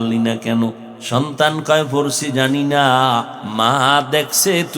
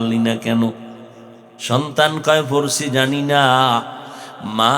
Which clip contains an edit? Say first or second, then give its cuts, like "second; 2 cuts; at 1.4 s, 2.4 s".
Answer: first; 2 cuts; at 0.9 s, 3.4 s